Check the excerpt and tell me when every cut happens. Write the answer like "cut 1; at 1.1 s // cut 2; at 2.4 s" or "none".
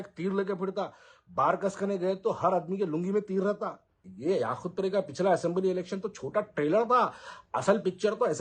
cut 1; at 4.0 s